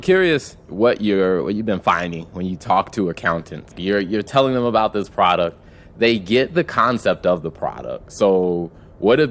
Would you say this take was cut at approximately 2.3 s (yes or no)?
no